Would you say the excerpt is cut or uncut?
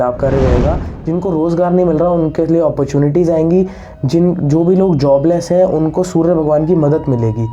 cut